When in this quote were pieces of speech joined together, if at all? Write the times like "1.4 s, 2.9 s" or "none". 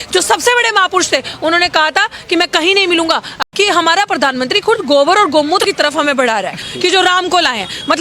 3.4 s, 5.6 s, 6.6 s